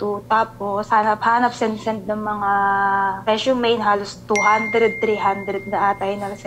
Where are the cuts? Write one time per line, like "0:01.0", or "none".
none